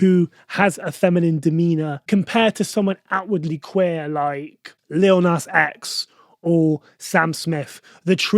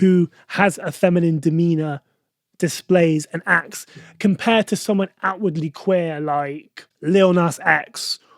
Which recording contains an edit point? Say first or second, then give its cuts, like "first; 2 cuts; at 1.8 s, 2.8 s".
first; 1 cut; at 2.0 s